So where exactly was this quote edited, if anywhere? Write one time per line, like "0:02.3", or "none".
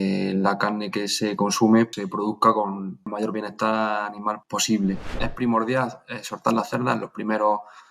0:01.9
0:03.1
0:04.4
0:05.2